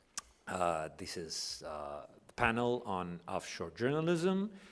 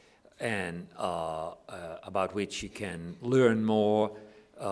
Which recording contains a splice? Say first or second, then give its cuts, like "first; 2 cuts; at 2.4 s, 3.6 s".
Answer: first; 1 cut; at 1.4 s